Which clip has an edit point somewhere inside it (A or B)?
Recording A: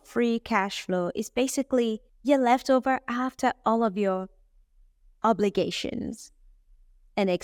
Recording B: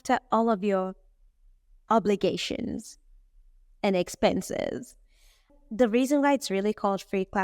B